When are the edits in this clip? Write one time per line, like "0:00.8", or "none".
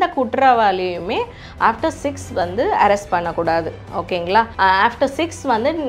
0:04.5